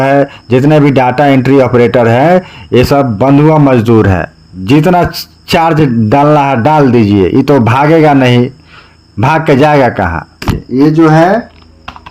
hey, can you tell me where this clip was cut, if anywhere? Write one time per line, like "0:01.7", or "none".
0:10.6